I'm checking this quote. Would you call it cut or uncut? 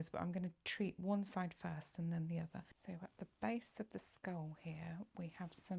cut